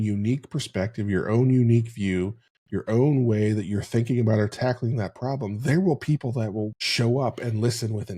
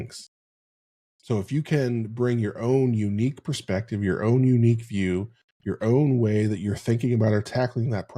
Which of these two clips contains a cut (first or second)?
first